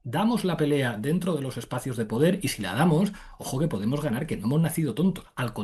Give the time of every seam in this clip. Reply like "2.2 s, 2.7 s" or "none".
none